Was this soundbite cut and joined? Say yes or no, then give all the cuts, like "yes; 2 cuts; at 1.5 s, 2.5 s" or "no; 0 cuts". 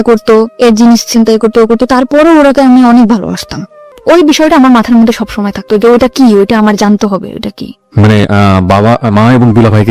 yes; 1 cut; at 3.9 s